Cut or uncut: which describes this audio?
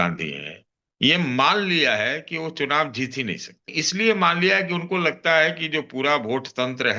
cut